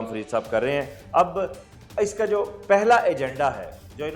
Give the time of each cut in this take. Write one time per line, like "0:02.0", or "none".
none